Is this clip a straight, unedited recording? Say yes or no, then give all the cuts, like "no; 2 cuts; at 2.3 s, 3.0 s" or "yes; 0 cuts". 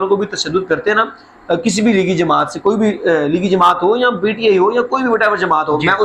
yes; 0 cuts